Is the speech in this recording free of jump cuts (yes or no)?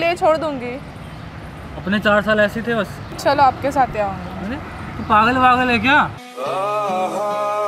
no